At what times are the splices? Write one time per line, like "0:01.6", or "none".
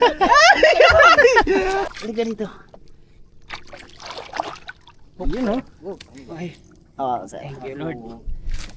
0:01.8